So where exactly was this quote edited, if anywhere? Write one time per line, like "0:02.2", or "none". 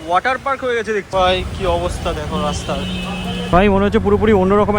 0:01.1
0:03.5